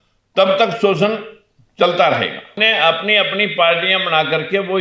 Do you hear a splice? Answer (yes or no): yes